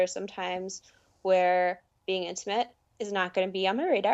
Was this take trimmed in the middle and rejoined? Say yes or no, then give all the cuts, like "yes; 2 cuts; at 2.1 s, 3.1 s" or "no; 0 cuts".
yes; 1 cut; at 2.8 s